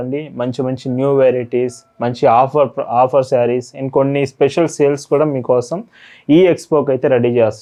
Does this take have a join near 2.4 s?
no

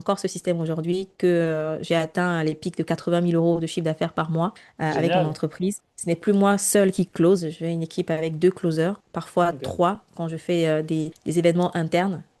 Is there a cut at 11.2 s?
no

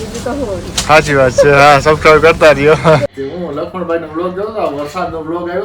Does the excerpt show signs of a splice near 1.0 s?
no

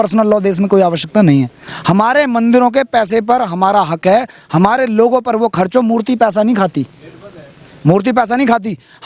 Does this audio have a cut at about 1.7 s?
yes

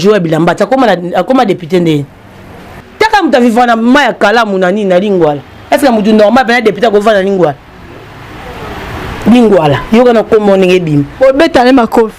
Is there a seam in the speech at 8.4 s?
no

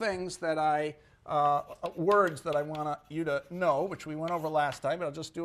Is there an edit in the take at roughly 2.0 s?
no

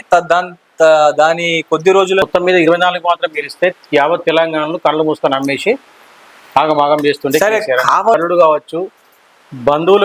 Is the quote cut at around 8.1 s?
yes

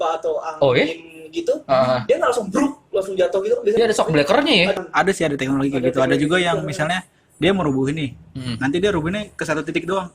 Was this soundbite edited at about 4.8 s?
yes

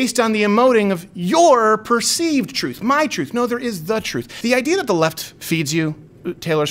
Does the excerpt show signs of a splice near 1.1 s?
no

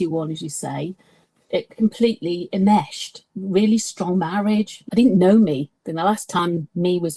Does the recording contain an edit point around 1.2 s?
no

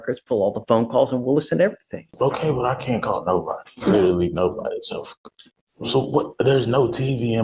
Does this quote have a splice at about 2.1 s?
yes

